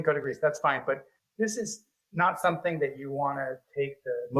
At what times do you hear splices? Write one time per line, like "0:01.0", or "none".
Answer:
0:01.2